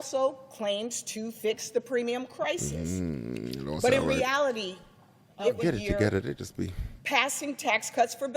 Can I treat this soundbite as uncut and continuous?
no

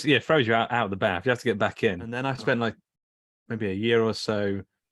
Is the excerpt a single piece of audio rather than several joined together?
no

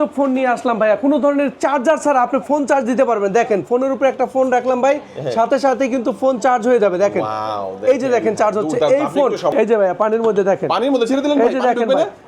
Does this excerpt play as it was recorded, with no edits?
no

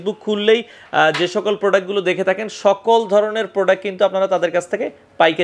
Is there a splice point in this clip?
no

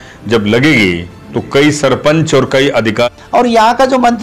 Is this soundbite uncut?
no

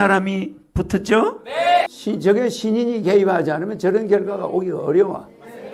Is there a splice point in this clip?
yes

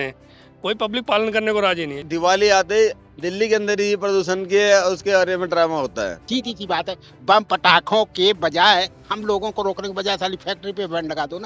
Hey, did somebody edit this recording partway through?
yes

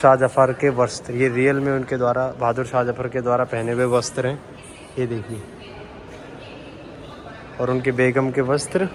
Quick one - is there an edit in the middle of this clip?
no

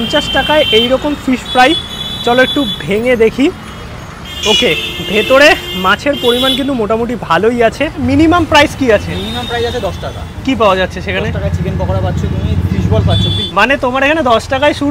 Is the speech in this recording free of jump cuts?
no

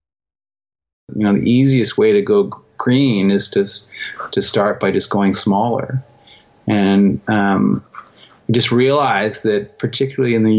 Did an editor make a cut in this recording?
yes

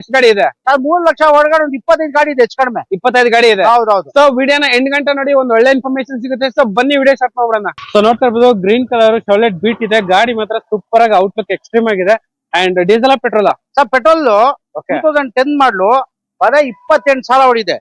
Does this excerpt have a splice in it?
yes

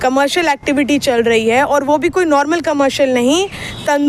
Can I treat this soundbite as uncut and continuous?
yes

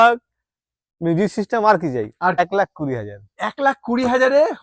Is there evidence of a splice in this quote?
yes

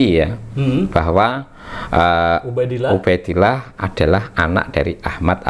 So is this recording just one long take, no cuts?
yes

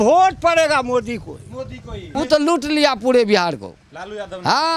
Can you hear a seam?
yes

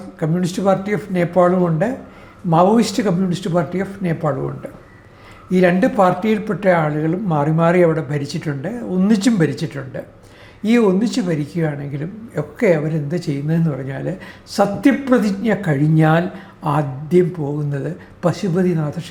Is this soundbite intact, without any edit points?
yes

